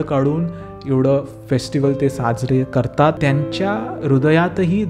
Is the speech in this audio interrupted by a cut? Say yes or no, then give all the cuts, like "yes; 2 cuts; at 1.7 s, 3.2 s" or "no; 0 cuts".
yes; 1 cut; at 3.2 s